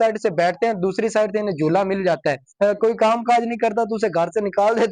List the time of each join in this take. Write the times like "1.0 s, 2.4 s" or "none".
2.4 s